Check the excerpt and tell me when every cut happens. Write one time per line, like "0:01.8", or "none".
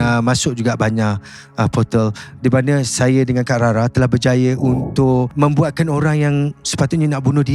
0:05.3